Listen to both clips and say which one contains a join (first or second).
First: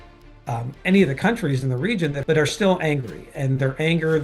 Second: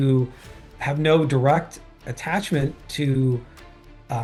first